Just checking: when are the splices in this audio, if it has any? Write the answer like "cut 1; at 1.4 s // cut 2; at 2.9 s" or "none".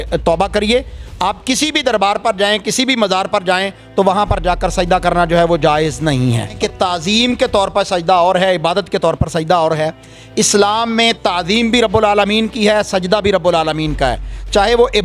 cut 1; at 6.5 s